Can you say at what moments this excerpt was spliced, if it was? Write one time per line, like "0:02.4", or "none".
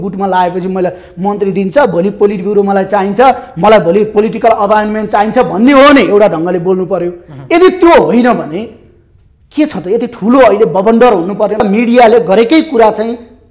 0:11.6